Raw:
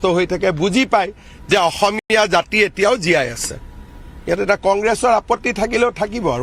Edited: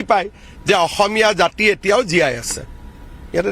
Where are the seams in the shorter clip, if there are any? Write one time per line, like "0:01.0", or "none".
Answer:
0:01.1